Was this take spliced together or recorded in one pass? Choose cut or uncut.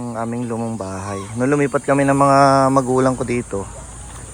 uncut